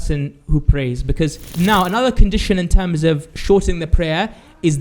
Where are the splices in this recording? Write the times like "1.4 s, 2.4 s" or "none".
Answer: 1.4 s